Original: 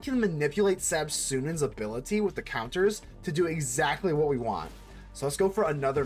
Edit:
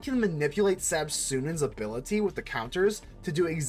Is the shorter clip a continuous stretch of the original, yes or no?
yes